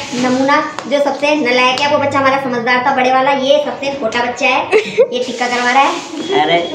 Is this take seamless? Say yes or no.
yes